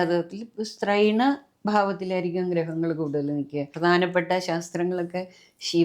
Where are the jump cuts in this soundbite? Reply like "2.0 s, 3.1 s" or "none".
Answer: 3.7 s